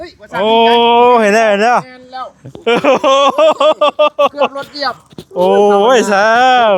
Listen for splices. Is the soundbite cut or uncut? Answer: uncut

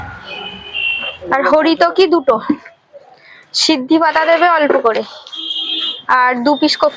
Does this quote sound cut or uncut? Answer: uncut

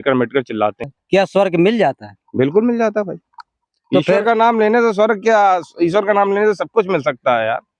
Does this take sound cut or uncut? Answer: cut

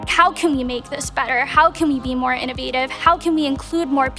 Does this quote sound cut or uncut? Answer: uncut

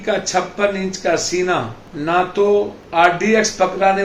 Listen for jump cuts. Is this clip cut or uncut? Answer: cut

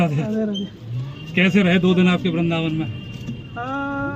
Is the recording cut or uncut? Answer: uncut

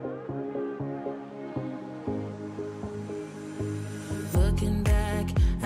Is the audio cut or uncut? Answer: uncut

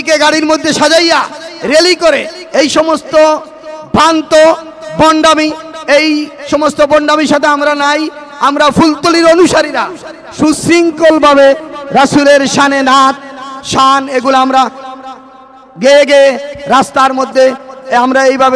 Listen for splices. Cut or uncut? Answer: uncut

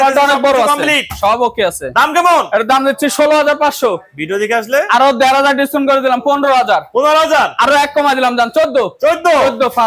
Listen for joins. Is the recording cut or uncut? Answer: uncut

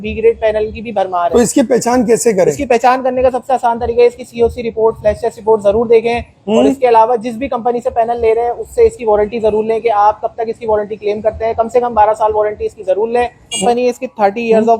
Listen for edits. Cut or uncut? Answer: cut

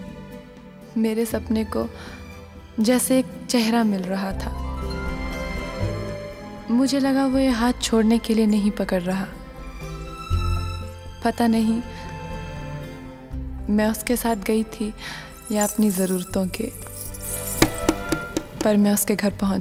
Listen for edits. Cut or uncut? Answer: uncut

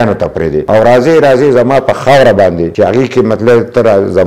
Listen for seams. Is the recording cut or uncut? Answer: uncut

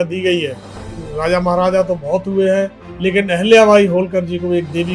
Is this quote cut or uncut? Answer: cut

